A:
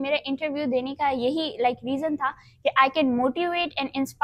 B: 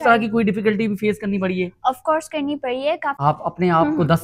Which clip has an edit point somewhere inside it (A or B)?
B